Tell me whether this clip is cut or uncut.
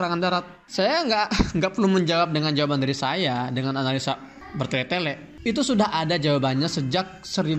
cut